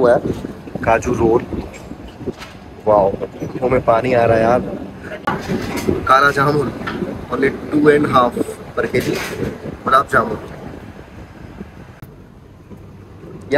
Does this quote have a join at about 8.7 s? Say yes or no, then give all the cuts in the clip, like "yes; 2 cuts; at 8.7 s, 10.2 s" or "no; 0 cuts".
no; 2 cuts; at 5.3 s, 11.9 s